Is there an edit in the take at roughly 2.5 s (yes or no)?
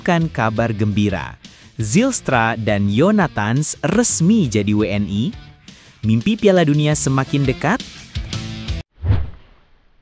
no